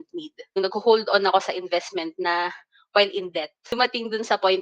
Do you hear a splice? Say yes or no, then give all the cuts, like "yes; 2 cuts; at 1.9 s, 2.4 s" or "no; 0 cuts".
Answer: yes; 1 cut; at 3.6 s